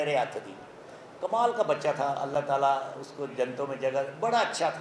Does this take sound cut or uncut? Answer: uncut